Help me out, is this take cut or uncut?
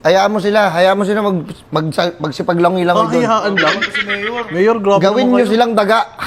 uncut